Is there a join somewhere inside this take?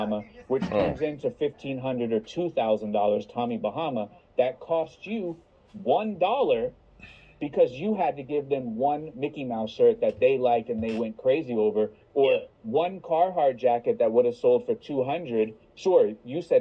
yes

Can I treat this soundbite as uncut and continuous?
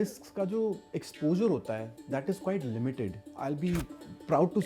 no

